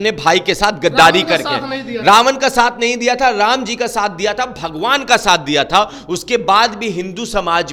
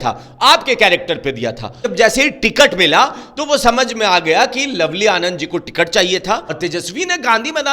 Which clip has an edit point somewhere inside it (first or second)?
second